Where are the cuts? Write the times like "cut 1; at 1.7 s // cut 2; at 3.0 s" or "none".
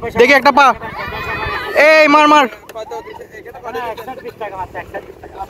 none